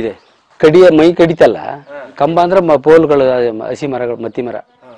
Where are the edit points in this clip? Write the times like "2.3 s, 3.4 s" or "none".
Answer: none